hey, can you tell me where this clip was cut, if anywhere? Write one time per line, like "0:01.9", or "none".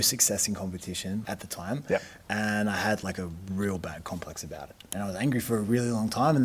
0:01.2
0:04.9